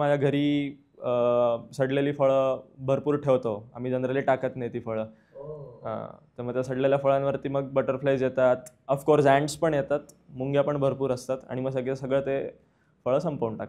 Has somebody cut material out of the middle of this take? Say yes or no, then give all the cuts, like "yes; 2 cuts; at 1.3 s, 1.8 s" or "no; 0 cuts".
no; 0 cuts